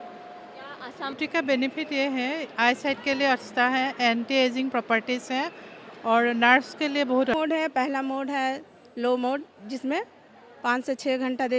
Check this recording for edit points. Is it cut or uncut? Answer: cut